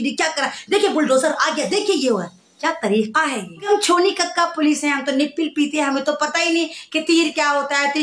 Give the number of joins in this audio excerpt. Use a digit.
1